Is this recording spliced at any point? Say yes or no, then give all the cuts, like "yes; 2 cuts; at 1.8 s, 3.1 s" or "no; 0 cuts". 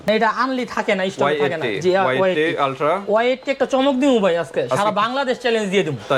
no; 0 cuts